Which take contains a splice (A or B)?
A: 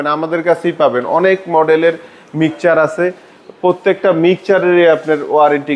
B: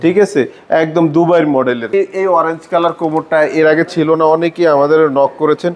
B